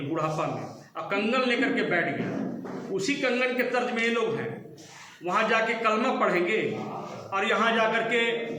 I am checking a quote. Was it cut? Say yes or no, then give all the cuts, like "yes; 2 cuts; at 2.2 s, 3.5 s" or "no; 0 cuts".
no; 0 cuts